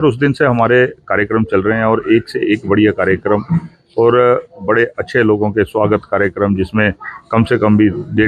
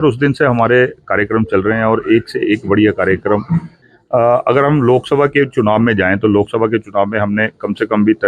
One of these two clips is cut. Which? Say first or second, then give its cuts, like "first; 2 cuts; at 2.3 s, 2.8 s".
second; 1 cut; at 3.8 s